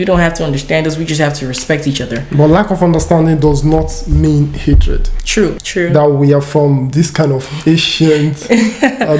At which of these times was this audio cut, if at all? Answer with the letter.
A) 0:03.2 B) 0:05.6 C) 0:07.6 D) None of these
B